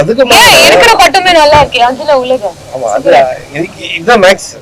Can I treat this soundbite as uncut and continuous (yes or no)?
yes